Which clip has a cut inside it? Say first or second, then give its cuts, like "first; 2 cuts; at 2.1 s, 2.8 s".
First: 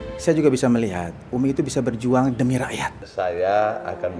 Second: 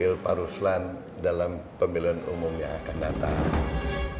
first; 1 cut; at 3.0 s